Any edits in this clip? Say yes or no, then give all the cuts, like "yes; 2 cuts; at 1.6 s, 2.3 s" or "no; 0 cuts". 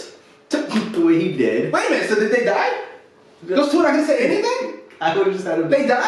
no; 0 cuts